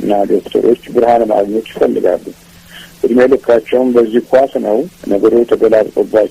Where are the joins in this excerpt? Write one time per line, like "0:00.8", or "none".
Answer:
0:04.9

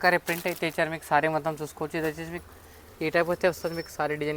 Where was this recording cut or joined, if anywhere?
none

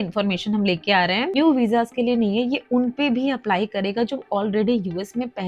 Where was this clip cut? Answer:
0:01.4

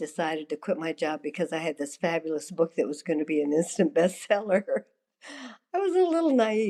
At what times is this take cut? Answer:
none

